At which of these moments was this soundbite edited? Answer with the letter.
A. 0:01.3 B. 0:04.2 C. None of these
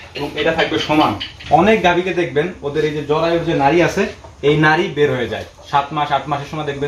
A